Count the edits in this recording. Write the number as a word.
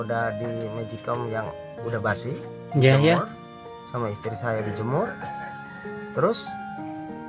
one